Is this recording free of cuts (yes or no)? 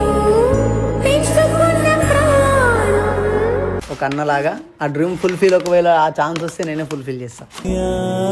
no